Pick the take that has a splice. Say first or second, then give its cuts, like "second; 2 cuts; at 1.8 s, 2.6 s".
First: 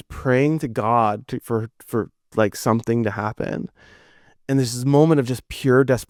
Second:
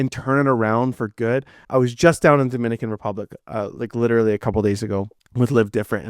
second; 2 cuts; at 1.6 s, 5.2 s